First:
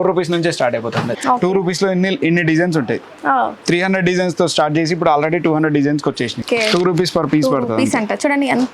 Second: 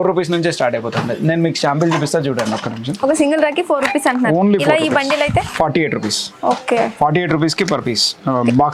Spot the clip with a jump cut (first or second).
first